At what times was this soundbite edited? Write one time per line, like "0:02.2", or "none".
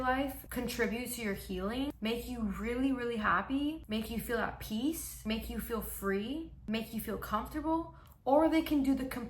none